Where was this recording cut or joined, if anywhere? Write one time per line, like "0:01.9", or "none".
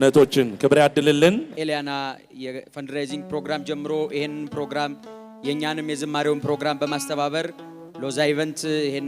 0:01.5